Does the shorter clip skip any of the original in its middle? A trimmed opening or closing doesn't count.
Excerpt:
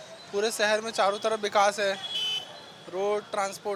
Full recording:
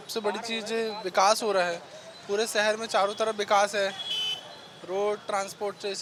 no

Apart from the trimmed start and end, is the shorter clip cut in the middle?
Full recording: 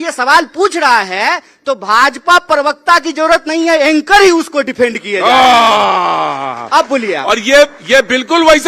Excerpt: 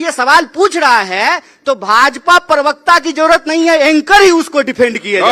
no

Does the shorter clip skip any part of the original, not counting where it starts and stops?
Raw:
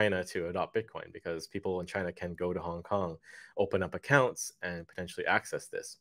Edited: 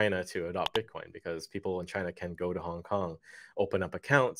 no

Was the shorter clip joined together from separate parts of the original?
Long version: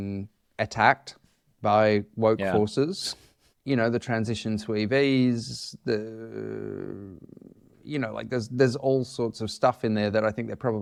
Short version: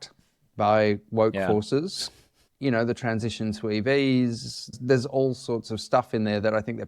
yes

